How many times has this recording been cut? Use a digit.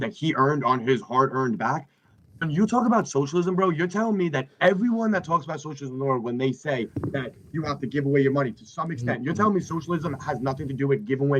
0